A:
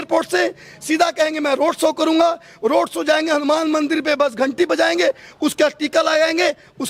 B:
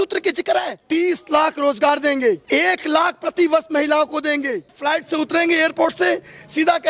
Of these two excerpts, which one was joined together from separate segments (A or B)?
B